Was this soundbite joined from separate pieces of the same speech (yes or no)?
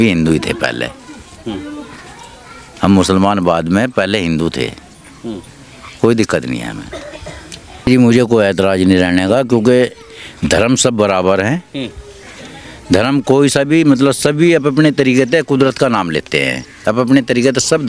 yes